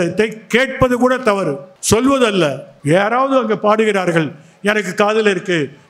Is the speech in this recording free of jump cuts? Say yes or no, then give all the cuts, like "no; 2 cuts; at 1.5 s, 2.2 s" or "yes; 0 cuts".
no; 2 cuts; at 1.7 s, 2.7 s